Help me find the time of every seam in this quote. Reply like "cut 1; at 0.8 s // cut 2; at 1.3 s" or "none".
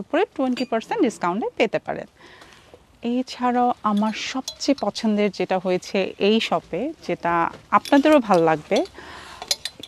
none